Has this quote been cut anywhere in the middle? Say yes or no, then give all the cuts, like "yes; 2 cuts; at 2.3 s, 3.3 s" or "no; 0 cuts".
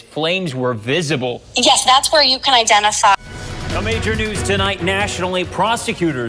no; 0 cuts